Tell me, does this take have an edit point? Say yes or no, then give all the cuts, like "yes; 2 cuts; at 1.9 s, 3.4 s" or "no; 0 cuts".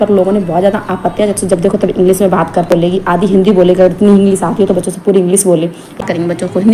yes; 3 cuts; at 1.4 s, 2.7 s, 6.0 s